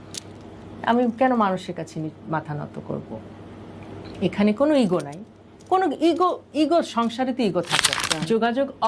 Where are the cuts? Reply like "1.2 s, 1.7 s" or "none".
8.0 s